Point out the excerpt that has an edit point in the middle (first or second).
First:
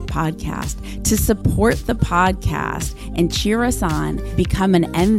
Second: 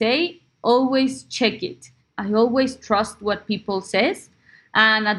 second